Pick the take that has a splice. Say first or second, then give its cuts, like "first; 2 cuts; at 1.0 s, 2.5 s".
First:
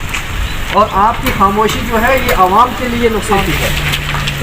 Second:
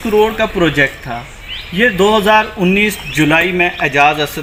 first; 1 cut; at 3.4 s